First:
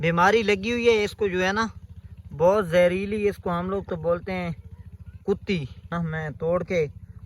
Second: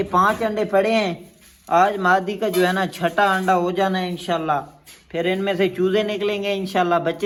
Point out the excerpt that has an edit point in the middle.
first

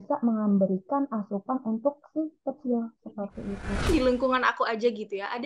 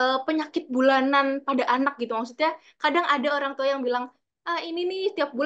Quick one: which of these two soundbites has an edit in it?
first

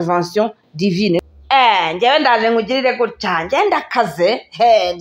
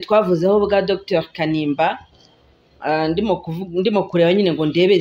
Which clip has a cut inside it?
first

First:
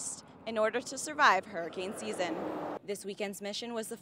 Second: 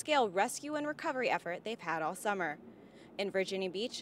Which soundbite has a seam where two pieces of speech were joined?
first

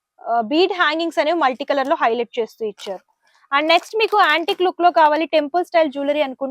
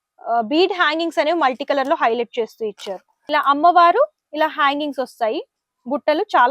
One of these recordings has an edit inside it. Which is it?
second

